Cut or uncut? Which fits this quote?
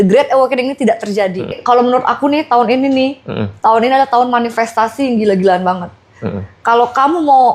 cut